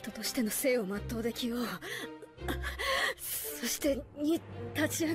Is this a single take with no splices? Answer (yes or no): no